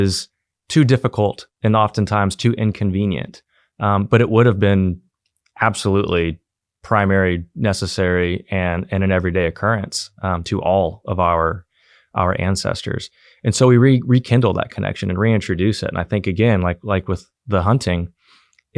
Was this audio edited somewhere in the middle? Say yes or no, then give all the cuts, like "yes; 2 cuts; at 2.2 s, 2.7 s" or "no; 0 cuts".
no; 0 cuts